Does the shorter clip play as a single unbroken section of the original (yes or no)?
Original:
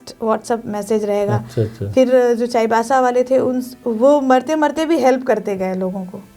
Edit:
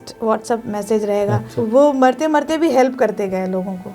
no